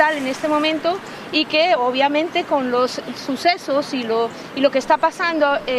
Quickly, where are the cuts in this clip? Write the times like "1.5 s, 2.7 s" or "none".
none